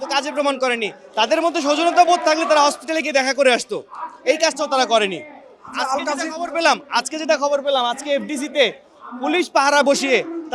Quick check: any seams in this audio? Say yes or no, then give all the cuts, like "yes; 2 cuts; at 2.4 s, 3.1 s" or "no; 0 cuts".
no; 0 cuts